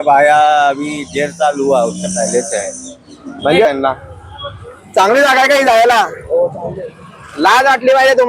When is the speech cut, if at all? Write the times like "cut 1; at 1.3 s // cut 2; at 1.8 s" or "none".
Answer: cut 1; at 3.7 s

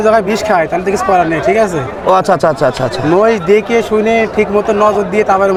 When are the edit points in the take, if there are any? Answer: none

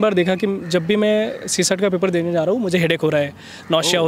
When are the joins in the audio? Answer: none

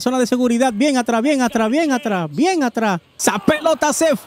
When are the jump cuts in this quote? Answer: cut 1; at 3.1 s

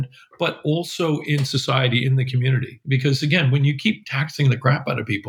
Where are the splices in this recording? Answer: none

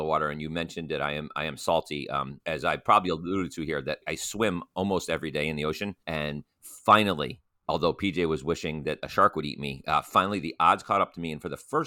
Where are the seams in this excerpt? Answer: cut 1; at 2.3 s // cut 2; at 4.0 s // cut 3; at 6.0 s

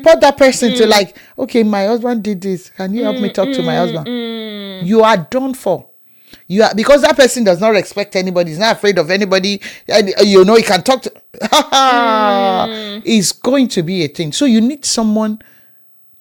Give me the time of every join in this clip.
none

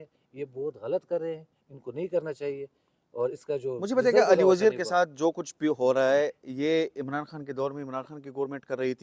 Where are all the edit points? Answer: none

